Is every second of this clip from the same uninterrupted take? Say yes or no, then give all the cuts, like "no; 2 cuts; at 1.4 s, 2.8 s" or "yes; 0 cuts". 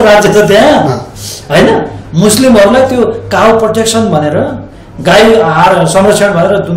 yes; 0 cuts